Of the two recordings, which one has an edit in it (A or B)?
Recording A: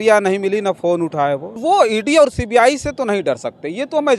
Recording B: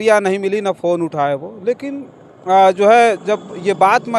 A